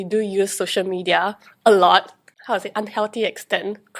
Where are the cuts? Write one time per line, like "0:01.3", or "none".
0:02.2